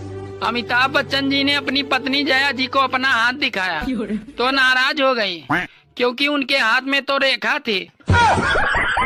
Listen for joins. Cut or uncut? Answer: uncut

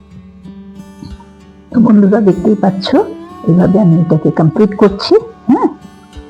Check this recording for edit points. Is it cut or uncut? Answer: uncut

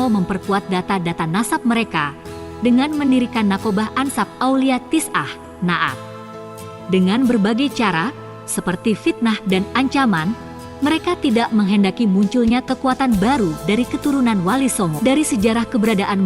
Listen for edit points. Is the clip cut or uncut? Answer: cut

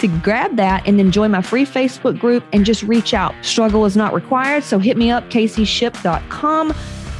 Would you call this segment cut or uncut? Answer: uncut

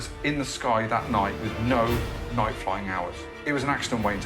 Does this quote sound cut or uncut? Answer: cut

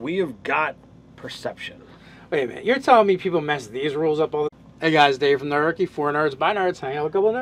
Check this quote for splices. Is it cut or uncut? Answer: uncut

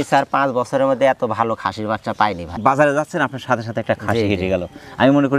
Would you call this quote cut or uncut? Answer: cut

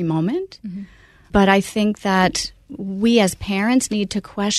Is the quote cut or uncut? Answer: cut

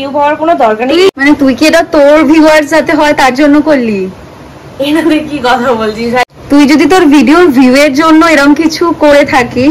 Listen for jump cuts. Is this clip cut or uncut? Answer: cut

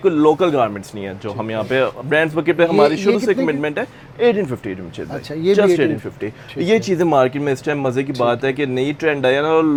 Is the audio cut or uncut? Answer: uncut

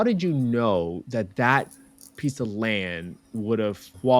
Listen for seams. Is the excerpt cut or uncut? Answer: uncut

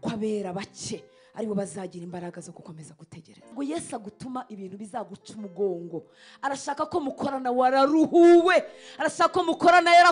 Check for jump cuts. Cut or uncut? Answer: cut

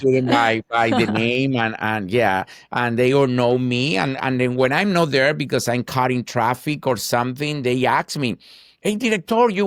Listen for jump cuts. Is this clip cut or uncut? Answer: uncut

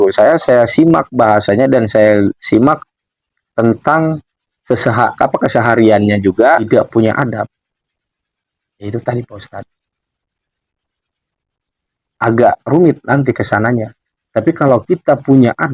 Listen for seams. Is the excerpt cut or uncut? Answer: cut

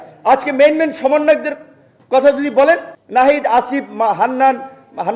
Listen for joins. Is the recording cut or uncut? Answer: cut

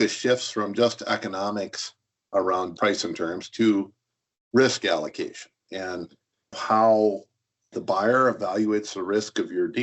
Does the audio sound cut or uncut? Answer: cut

